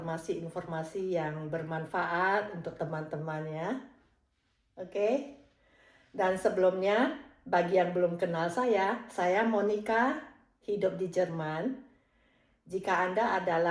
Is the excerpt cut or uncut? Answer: uncut